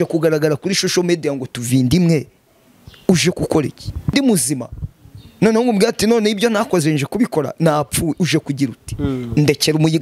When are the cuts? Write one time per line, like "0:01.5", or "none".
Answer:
0:04.1